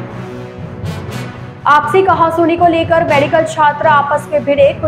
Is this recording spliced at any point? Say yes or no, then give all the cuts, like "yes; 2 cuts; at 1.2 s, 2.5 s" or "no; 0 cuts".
no; 0 cuts